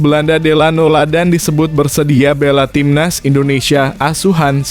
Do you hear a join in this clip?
no; 0 cuts

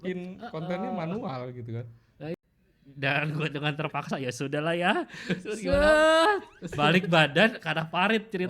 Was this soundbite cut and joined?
yes; 1 cut; at 2.3 s

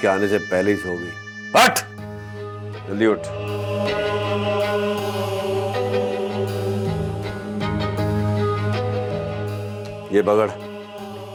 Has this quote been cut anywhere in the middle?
no; 0 cuts

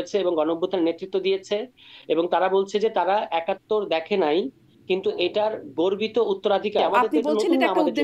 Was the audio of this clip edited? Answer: yes; 1 cut; at 6.9 s

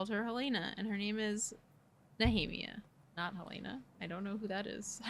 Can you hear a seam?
yes; 1 cut; at 3.0 s

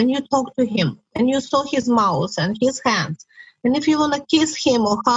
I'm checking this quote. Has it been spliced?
no; 0 cuts

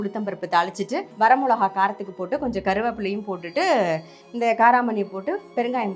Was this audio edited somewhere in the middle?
yes; 1 cut; at 1.1 s

